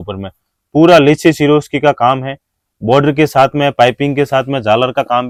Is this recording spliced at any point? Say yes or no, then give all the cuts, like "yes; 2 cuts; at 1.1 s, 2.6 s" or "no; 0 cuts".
no; 0 cuts